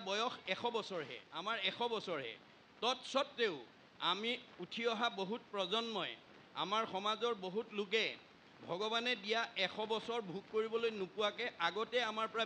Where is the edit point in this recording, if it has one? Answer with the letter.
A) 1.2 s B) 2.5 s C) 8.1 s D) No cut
A